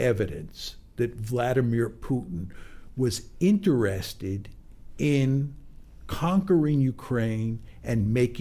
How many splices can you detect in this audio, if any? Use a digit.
0